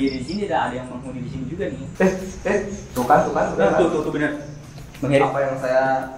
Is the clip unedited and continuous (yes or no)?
no